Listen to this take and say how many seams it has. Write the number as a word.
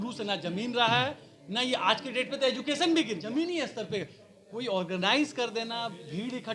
one